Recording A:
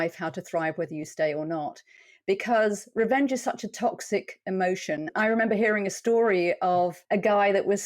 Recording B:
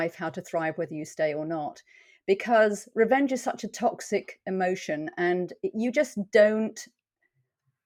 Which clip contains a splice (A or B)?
A